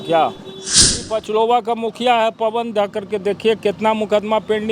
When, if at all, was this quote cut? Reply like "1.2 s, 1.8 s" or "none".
1.0 s